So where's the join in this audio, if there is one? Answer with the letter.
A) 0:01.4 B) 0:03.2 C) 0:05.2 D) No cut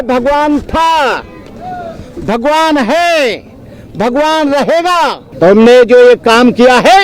C